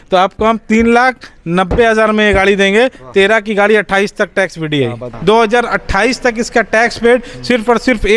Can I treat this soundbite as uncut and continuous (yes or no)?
no